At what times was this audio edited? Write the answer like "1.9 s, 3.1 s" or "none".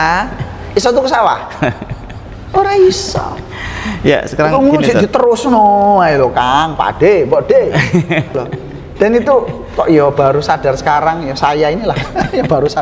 8.4 s